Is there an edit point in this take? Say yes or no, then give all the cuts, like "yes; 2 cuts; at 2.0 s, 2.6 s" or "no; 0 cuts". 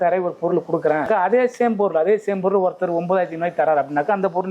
yes; 1 cut; at 1.1 s